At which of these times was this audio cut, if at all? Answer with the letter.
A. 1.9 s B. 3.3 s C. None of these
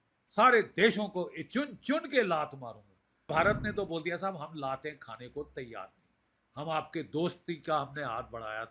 B